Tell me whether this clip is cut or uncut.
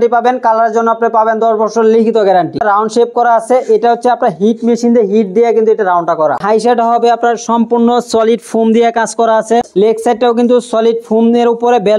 cut